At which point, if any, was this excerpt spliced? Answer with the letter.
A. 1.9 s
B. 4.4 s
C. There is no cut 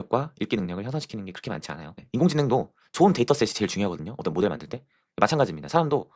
A